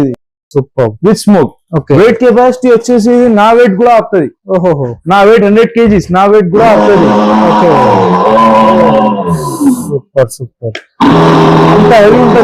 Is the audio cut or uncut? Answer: uncut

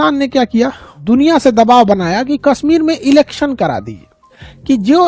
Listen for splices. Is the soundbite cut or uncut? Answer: cut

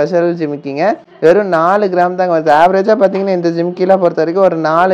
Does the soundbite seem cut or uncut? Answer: uncut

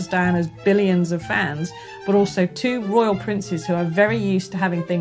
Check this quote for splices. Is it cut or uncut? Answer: uncut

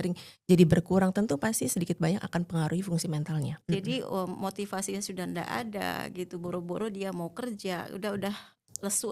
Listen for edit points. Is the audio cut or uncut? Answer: cut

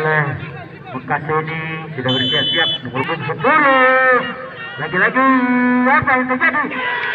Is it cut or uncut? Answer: cut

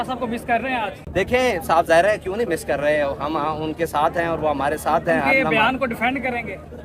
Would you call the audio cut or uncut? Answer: cut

